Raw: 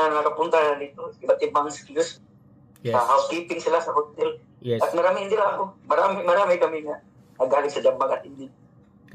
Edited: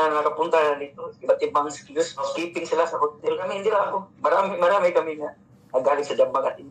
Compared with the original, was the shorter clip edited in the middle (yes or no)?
yes